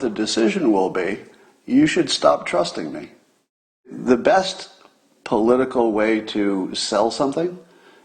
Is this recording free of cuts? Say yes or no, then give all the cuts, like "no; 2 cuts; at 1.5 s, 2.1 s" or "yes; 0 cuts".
no; 1 cut; at 3.9 s